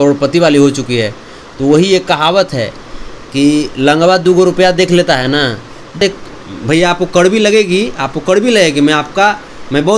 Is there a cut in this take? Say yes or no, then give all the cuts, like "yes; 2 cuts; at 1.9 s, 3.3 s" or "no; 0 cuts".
yes; 1 cut; at 6.0 s